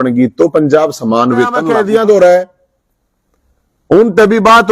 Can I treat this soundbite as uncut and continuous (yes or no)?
no